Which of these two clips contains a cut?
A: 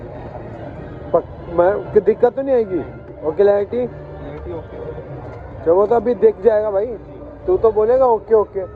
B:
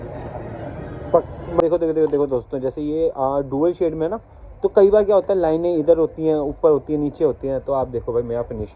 B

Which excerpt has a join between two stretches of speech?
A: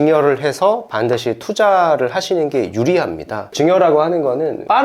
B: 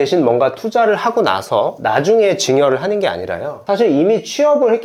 A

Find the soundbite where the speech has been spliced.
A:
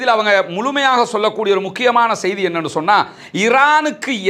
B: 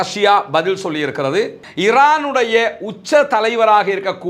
B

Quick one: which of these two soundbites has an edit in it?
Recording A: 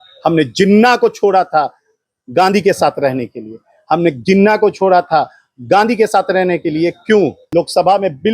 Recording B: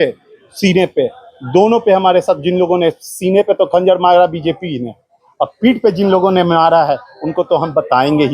A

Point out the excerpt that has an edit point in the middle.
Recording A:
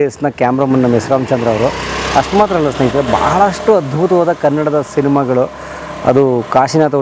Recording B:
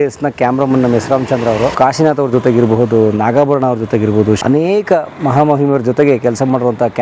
B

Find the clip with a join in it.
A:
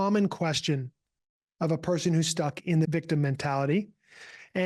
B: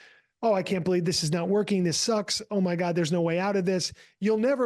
A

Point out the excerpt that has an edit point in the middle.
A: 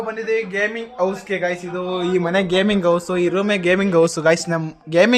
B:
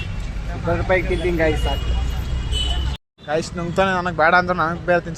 B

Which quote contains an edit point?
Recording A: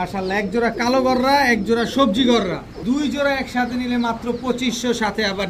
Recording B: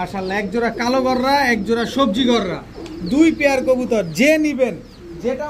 A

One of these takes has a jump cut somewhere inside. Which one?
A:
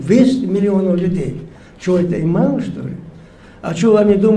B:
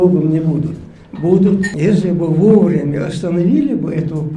B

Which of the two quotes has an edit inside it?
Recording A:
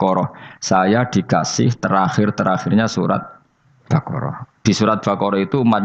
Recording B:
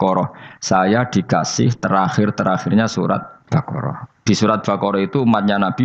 B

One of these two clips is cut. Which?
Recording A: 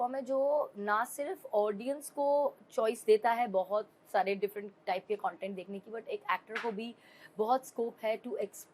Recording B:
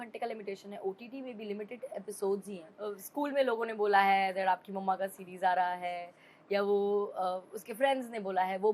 B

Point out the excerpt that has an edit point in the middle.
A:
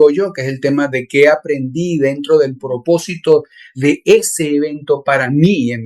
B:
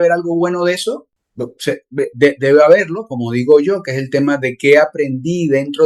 B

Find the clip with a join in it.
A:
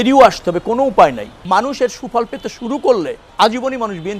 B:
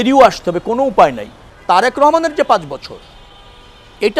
A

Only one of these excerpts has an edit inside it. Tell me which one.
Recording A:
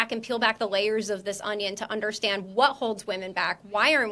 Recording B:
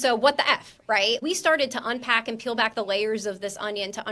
B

